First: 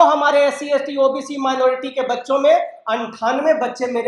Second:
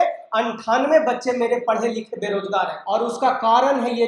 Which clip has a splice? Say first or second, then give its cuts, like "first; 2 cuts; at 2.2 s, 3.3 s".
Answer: second; 1 cut; at 2.8 s